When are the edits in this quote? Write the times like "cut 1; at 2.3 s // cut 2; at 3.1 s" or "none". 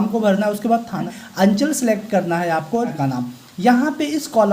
cut 1; at 1.1 s // cut 2; at 2.9 s